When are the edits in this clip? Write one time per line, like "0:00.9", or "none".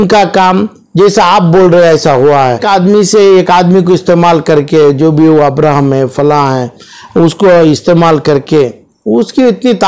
0:02.6